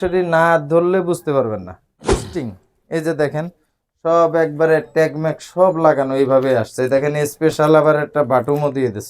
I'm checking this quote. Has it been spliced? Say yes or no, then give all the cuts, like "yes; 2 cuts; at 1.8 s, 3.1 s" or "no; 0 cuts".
yes; 1 cut; at 2.3 s